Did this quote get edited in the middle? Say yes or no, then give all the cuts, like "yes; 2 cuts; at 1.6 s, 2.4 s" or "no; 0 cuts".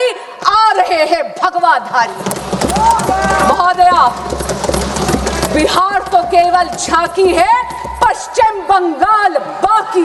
no; 0 cuts